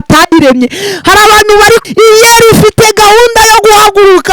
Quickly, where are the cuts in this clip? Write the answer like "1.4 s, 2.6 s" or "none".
1.8 s